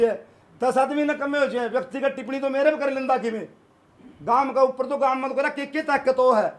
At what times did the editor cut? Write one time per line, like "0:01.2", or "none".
none